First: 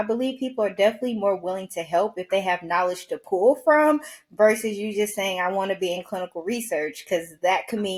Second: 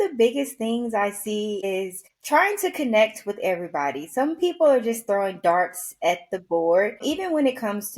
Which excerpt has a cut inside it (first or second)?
second